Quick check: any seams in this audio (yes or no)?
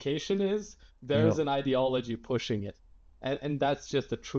no